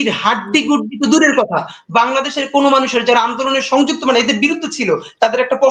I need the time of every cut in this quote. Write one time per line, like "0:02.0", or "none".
none